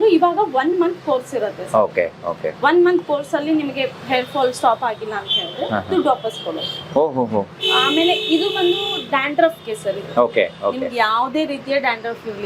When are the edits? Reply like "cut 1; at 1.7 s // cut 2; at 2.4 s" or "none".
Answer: none

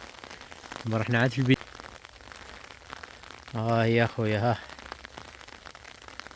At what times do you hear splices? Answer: cut 1; at 1.5 s

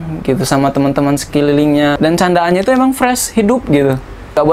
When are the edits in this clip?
cut 1; at 2.0 s

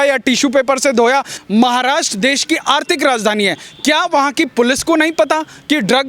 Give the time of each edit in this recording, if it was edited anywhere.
cut 1; at 1.3 s

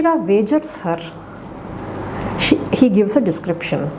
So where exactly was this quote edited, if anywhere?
none

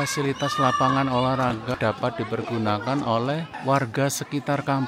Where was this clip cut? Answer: cut 1; at 1.7 s // cut 2; at 3.5 s

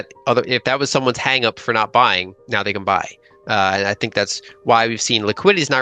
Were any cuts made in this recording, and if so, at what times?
cut 1; at 2.3 s

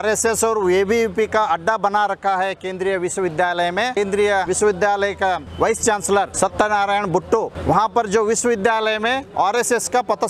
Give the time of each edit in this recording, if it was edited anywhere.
cut 1; at 4.3 s // cut 2; at 5.5 s // cut 3; at 6.3 s // cut 4; at 7.5 s // cut 5; at 9.3 s

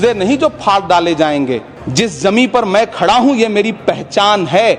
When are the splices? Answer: cut 1; at 1.8 s

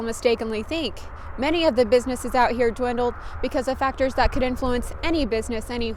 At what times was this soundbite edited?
none

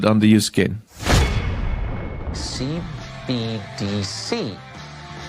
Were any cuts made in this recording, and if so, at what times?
cut 1; at 0.9 s // cut 2; at 2.3 s

